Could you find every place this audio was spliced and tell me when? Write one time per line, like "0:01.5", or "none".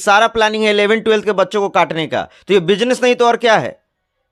none